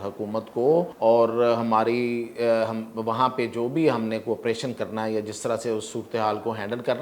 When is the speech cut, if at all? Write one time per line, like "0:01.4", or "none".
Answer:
0:00.9